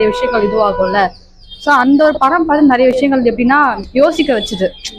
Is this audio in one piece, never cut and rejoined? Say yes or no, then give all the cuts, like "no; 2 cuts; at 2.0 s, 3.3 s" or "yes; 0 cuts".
yes; 0 cuts